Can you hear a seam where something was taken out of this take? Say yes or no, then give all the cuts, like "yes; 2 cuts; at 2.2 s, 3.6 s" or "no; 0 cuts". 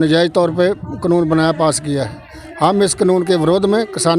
no; 0 cuts